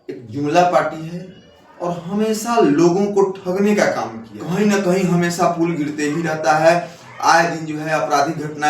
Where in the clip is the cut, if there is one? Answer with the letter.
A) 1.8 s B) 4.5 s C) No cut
B